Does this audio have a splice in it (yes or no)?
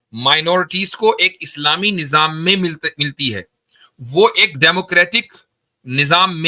yes